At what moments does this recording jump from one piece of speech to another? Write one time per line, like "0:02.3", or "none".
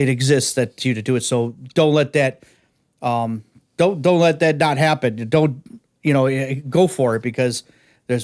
none